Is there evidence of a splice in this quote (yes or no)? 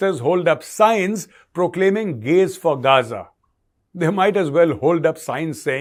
no